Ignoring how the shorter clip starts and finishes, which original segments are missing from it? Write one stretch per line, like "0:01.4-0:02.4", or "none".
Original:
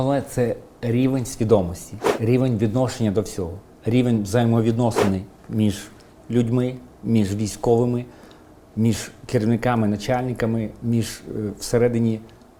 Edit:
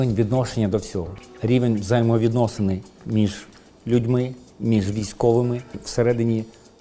0:08.2-0:11.6